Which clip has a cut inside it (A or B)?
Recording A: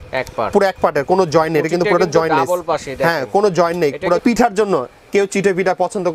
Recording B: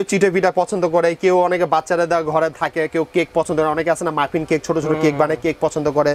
A